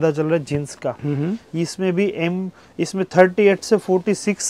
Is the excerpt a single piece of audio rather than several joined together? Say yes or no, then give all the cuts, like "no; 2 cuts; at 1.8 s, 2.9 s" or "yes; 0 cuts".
yes; 0 cuts